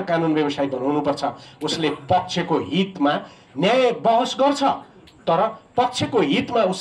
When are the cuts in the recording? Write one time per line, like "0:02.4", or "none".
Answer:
none

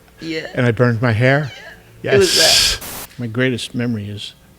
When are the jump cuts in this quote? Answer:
0:02.8

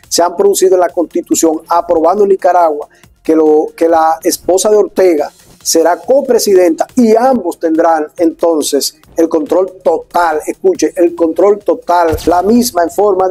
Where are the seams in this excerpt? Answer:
0:12.2

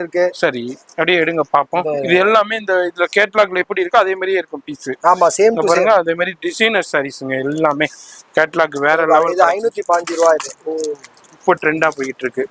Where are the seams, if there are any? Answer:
none

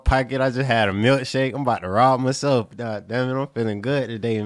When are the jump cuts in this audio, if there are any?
none

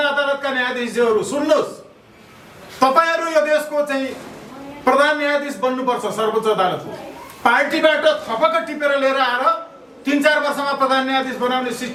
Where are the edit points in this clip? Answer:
none

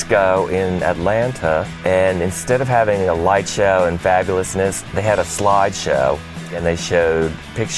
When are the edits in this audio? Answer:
0:01.7
0:04.8
0:06.6

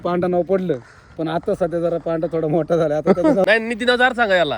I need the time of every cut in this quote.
0:03.5

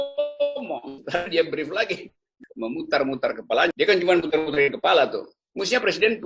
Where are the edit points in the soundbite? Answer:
0:02.3

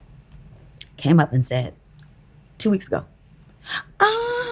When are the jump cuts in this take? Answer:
none

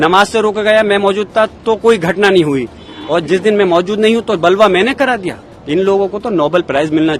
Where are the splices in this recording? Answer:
none

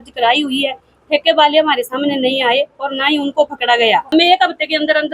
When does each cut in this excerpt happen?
0:04.1

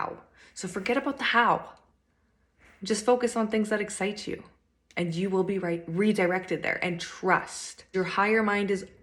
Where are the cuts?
0:07.9

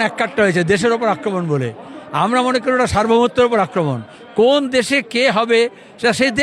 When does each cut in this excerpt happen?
none

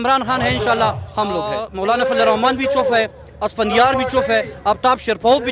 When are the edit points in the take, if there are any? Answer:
0:01.6

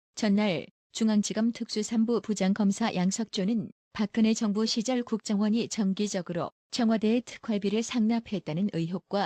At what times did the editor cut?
0:08.1

